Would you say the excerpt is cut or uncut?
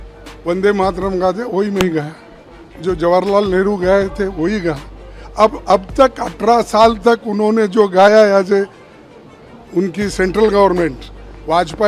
uncut